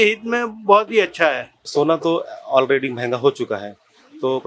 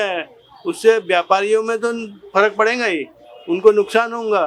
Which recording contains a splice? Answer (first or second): first